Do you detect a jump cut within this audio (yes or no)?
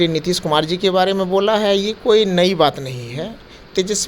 no